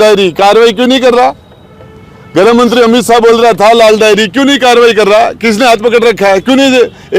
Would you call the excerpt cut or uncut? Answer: uncut